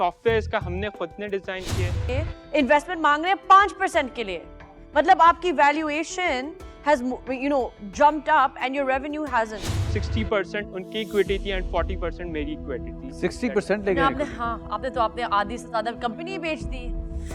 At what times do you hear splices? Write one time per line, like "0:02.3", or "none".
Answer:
0:02.0
0:10.0